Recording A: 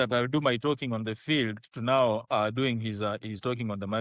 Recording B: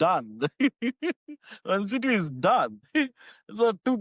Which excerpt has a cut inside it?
B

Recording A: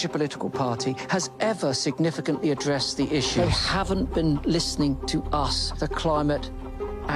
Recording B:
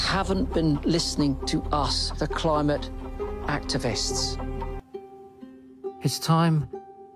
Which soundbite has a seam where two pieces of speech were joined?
B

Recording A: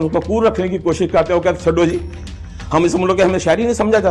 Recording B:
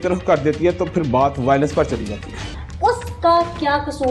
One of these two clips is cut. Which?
B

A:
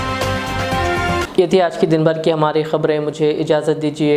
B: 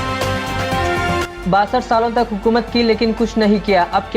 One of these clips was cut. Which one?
B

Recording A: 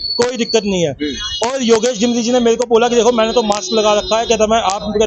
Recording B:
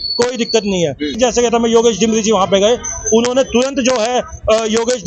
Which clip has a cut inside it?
B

